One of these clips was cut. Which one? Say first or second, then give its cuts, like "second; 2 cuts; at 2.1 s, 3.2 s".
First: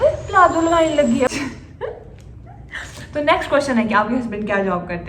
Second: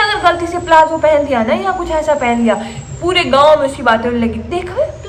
first; 1 cut; at 1.3 s